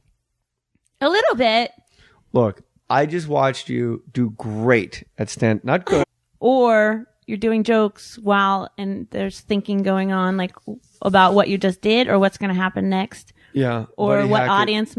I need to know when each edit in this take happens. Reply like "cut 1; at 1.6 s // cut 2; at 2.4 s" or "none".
none